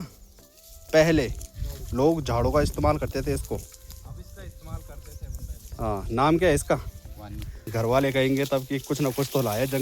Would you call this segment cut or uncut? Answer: cut